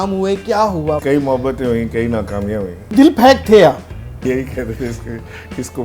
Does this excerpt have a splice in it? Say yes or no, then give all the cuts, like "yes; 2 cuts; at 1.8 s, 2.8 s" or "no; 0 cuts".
yes; 3 cuts; at 1.0 s, 2.9 s, 4.2 s